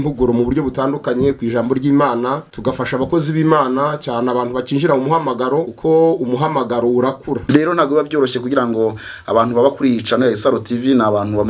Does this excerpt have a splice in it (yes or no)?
yes